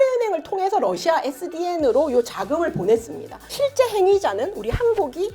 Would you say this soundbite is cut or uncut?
cut